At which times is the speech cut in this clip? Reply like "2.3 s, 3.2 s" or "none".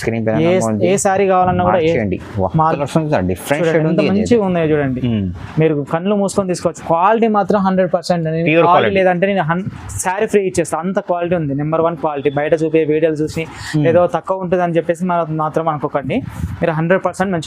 2.8 s